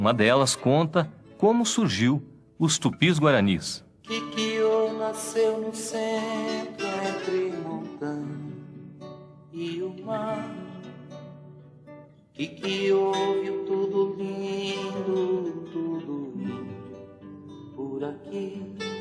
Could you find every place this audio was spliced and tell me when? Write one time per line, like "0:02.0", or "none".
0:17.1